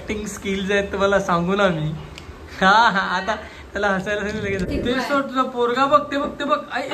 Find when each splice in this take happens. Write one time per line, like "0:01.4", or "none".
0:04.7